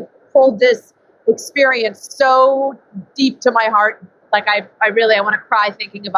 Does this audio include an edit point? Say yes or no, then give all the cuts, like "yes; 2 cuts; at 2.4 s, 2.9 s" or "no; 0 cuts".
yes; 1 cut; at 4.2 s